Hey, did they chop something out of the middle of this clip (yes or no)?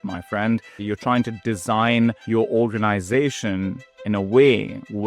yes